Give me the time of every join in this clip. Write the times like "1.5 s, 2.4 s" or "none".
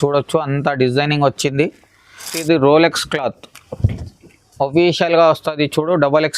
2.3 s